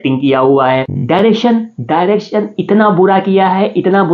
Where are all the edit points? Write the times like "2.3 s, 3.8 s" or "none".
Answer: 0.9 s